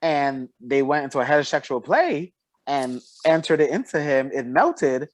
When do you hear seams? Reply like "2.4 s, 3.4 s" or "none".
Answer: none